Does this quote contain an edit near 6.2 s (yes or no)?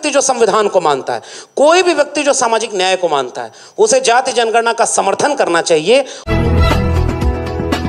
yes